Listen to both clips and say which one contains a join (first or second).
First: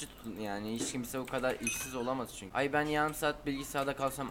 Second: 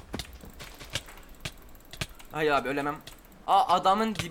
first